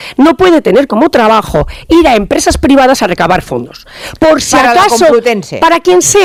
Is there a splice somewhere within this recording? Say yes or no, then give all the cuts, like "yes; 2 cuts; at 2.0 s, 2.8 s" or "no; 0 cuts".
no; 0 cuts